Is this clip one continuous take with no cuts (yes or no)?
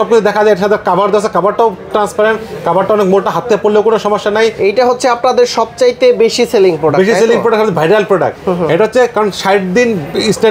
no